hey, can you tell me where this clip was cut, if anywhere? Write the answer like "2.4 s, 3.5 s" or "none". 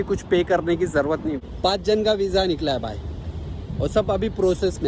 1.4 s